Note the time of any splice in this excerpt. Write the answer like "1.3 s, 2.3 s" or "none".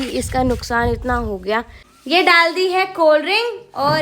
1.8 s